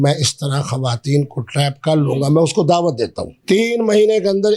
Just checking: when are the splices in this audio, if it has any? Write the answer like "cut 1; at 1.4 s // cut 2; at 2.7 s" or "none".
cut 1; at 3.3 s

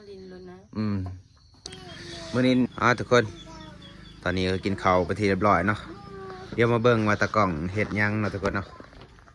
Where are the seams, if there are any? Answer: cut 1; at 2.7 s

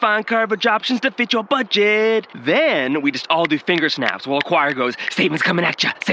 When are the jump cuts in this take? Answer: none

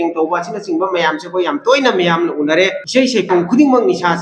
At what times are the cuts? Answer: cut 1; at 2.8 s

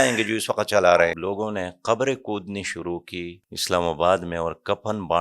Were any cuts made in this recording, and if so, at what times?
cut 1; at 1.2 s // cut 2; at 3.5 s

